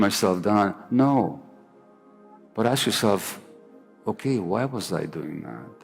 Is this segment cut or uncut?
uncut